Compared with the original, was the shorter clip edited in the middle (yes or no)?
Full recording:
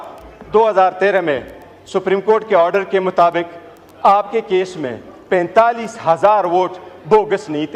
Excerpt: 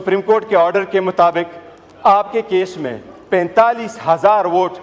no